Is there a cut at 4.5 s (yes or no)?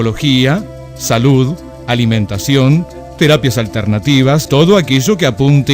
yes